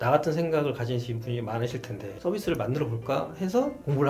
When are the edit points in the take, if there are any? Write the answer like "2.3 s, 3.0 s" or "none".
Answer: 2.1 s